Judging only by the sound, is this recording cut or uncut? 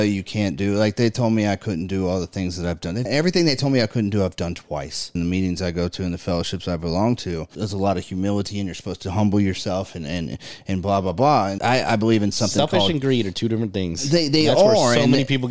cut